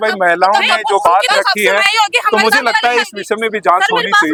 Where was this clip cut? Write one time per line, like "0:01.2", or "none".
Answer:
none